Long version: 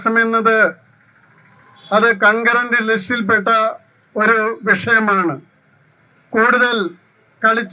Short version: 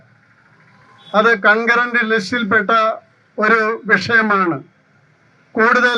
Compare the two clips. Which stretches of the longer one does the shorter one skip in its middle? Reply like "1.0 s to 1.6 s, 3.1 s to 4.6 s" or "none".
none